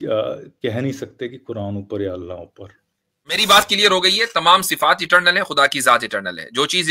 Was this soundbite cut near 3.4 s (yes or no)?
yes